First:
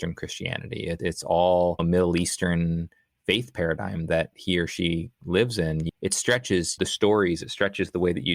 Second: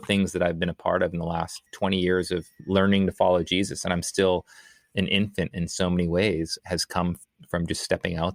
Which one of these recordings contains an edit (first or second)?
first